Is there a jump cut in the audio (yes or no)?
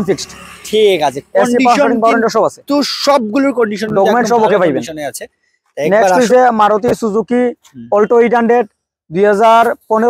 no